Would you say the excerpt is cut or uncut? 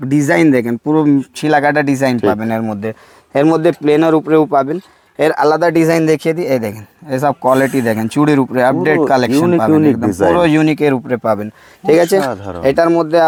uncut